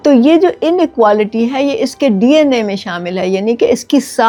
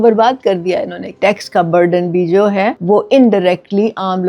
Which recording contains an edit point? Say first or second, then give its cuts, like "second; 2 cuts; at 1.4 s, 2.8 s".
second; 2 cuts; at 1.1 s, 2.8 s